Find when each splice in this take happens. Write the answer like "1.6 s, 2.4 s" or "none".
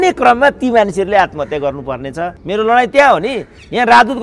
2.4 s

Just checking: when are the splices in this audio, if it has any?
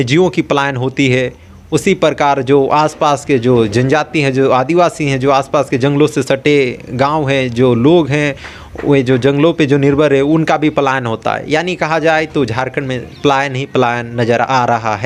none

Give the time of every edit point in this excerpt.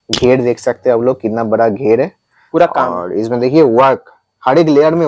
none

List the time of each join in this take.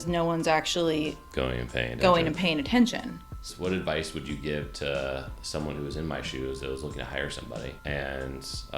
3.5 s, 7.8 s

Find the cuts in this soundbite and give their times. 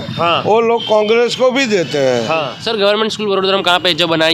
2.6 s

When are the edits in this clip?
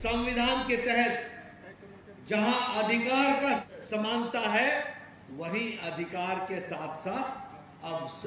3.6 s

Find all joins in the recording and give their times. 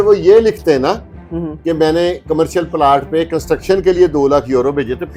none

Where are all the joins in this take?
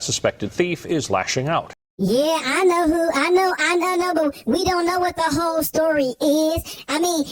1.8 s

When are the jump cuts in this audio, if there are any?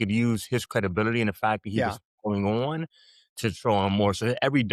none

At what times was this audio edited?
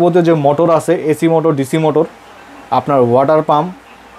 none

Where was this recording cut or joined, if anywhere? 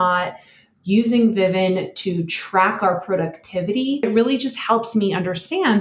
4.0 s

